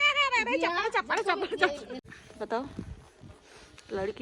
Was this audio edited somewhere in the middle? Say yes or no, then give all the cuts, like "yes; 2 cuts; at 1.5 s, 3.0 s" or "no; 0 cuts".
yes; 1 cut; at 2.0 s